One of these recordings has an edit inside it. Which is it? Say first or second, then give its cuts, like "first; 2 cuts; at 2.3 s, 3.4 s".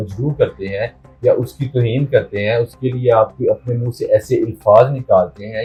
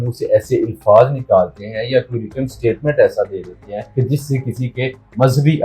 second; 1 cut; at 3.9 s